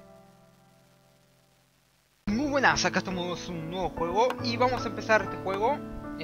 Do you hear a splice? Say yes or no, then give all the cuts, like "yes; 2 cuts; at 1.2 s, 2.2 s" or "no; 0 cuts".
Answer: no; 0 cuts